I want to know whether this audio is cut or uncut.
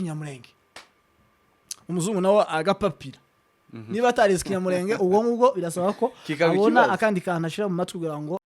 uncut